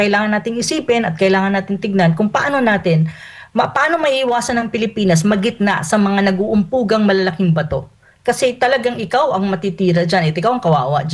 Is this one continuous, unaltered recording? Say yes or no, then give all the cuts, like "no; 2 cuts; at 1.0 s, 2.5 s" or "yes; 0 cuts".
yes; 0 cuts